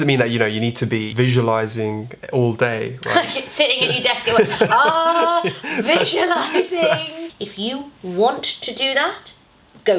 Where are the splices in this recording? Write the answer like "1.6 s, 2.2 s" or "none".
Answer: 1.1 s, 7.3 s